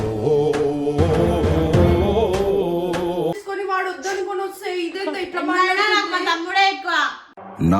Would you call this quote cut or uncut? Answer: cut